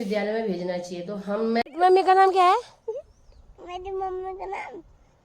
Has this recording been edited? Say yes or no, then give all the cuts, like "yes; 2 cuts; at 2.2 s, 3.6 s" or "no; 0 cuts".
yes; 1 cut; at 1.7 s